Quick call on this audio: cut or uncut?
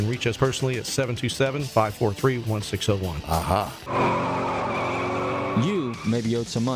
uncut